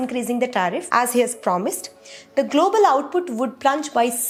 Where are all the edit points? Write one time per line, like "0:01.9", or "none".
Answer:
none